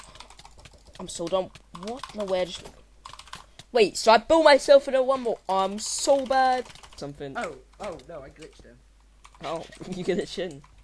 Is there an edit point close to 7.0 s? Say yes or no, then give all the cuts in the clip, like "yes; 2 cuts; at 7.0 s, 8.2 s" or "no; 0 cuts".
yes; 1 cut; at 7.0 s